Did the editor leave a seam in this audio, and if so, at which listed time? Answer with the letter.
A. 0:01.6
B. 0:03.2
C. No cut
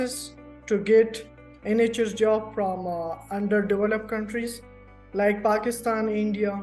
C